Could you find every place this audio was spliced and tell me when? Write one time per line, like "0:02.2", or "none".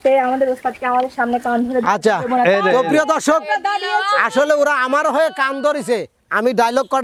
none